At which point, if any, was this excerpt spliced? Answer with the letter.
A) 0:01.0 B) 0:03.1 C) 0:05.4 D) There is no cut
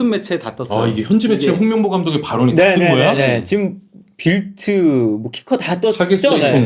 D